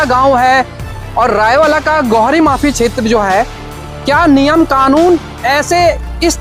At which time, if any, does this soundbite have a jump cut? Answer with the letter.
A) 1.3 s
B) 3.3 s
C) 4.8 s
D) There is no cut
D